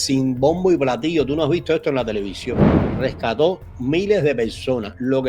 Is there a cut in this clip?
yes; 1 cut; at 2.4 s

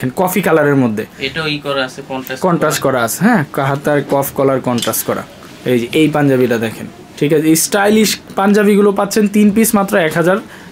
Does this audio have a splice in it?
no; 0 cuts

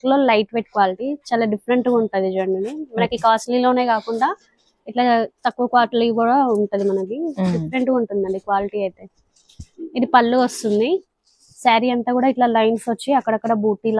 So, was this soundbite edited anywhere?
no; 0 cuts

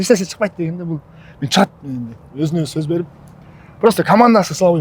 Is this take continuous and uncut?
yes; 0 cuts

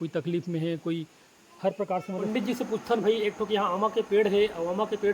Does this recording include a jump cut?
yes; 1 cut; at 2.3 s

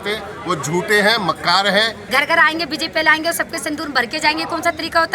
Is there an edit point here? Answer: yes; 1 cut; at 2.0 s

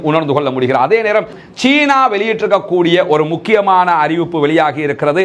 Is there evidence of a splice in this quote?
yes; 1 cut; at 1.4 s

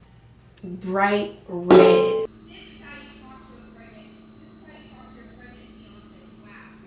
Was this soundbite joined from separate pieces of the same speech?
yes; 1 cut; at 2.3 s

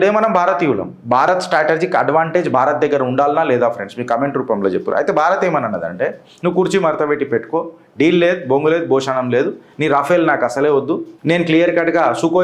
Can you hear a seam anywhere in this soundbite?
yes; 1 cut; at 11.1 s

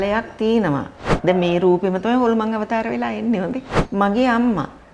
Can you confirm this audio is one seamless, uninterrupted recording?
no; 2 cuts; at 1.0 s, 3.6 s

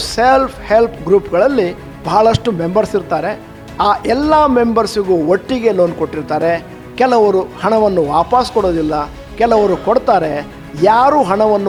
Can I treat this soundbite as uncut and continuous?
yes; 0 cuts

